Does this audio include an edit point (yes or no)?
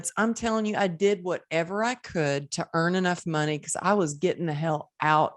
no